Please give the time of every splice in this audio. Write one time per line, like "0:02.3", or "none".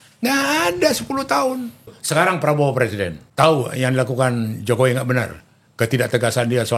0:02.0
0:03.2